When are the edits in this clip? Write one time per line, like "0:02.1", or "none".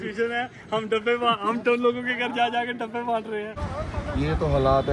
0:03.6